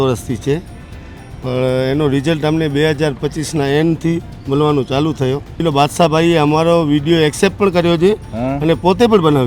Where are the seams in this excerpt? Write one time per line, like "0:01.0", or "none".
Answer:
0:05.6